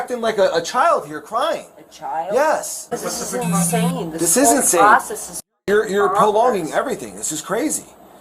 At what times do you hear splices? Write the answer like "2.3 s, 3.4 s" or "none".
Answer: 2.9 s